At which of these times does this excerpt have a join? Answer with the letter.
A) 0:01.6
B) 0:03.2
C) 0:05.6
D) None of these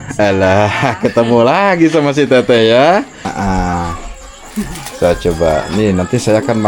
B